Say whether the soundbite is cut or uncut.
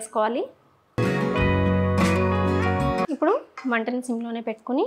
uncut